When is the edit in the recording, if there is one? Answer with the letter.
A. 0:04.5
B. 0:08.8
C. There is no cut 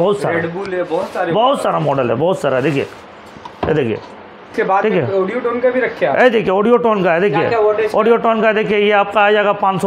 A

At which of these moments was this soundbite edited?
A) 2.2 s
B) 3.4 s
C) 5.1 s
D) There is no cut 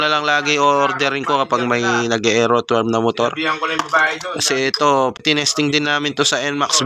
C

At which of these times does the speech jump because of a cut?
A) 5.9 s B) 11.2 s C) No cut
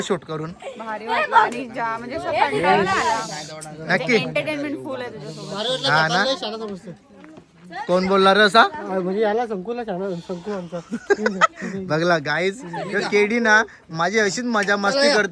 C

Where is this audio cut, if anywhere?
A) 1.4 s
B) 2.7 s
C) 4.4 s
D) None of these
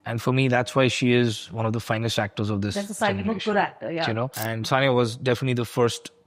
C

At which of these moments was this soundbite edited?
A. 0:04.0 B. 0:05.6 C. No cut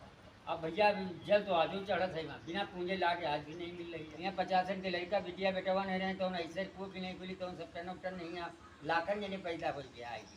A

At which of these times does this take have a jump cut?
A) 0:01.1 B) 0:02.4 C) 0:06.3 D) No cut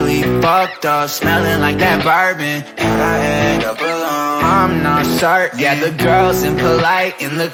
D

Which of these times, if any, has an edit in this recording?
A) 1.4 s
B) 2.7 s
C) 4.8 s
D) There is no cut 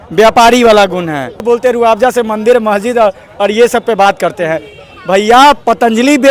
A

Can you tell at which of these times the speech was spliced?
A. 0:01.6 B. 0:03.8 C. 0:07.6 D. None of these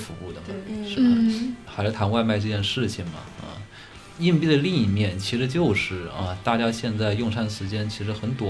A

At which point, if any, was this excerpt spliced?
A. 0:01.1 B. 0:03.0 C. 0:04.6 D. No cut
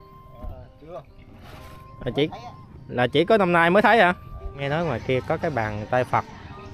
C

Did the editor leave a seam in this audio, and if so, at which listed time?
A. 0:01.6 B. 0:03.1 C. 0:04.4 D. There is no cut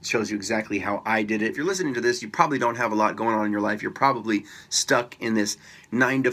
A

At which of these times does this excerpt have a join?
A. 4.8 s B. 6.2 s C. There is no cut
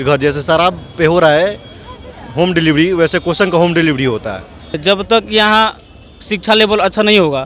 A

